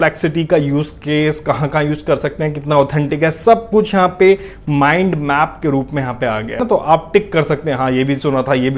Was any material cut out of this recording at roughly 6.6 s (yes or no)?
yes